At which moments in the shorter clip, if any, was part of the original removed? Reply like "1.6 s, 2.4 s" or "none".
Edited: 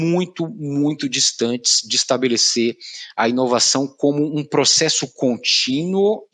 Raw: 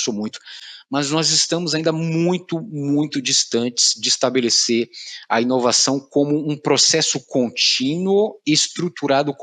none